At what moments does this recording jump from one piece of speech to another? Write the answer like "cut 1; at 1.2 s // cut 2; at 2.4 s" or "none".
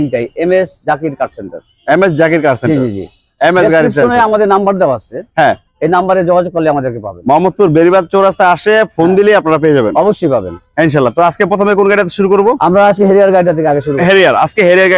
none